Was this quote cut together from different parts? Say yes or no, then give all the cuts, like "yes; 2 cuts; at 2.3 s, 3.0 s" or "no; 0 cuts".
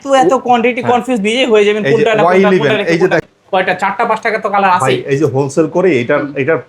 yes; 1 cut; at 3.3 s